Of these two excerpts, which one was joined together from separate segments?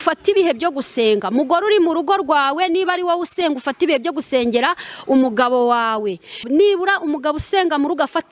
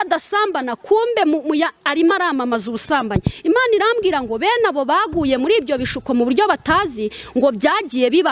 first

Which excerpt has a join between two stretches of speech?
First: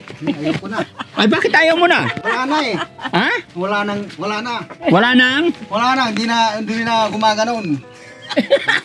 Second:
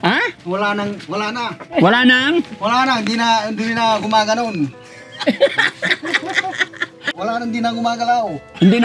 second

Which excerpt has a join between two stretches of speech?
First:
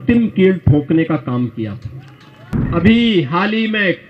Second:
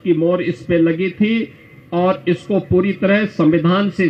first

